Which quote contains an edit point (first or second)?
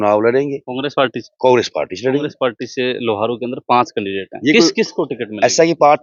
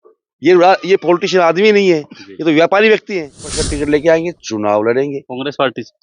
second